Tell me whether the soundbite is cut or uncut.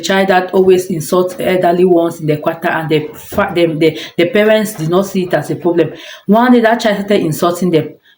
uncut